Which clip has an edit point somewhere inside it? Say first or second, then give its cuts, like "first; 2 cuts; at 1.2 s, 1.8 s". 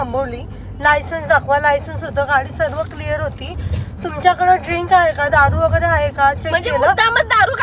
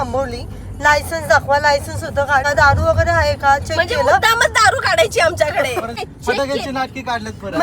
second; 2 cuts; at 2.4 s, 6.0 s